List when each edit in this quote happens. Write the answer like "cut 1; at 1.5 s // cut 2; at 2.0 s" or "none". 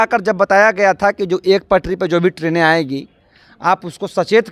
none